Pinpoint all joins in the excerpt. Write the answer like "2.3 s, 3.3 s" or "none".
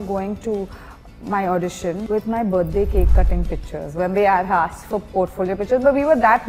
2.0 s